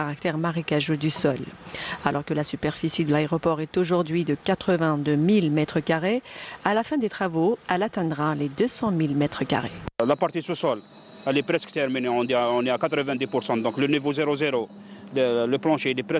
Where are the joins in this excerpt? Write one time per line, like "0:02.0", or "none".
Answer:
0:05.5